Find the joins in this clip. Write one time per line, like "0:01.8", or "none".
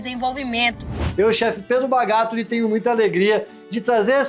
0:01.0